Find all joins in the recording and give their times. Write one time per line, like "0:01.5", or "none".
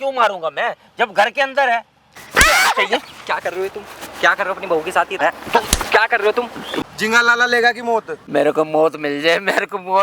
0:02.2
0:05.2
0:06.6
0:08.2